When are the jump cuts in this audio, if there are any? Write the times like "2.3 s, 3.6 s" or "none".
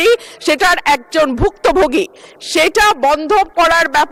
none